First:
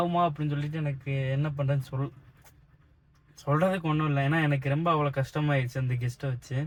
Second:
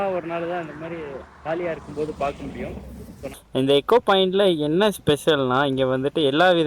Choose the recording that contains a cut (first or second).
second